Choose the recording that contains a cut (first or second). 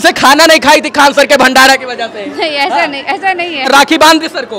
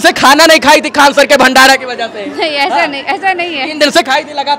first